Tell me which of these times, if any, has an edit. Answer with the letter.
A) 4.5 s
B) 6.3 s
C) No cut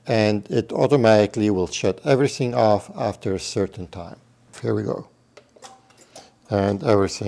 A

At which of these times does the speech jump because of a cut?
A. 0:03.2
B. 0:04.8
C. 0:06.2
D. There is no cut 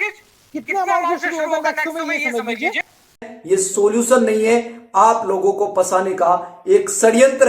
A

